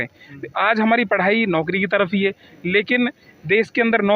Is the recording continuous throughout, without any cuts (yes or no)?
yes